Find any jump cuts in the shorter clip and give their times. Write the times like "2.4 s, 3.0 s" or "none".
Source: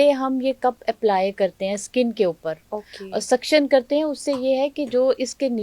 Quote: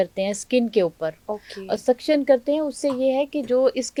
none